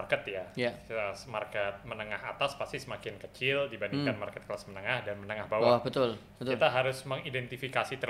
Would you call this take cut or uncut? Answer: uncut